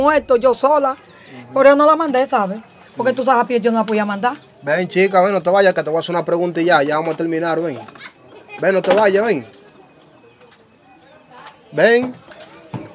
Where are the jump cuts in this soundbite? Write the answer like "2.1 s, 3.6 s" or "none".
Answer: none